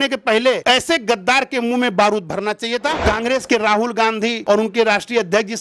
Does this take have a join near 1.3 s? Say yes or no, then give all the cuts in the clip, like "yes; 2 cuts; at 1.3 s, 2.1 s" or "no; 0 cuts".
no; 2 cuts; at 3.0 s, 4.4 s